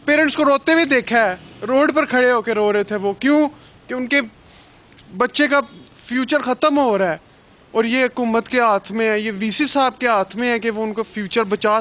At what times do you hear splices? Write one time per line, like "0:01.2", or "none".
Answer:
none